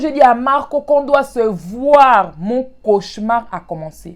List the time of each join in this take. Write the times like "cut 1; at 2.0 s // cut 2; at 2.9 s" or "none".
none